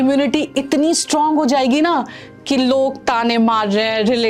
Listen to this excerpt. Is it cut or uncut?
uncut